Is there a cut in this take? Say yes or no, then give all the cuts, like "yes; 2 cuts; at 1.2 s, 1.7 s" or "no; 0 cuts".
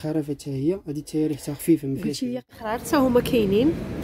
yes; 1 cut; at 2.5 s